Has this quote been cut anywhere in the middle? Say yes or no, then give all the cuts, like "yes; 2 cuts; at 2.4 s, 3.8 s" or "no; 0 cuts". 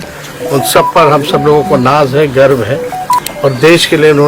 yes; 1 cut; at 3.2 s